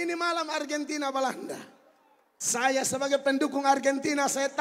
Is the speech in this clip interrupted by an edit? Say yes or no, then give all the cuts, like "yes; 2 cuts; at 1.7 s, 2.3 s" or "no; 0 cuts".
no; 0 cuts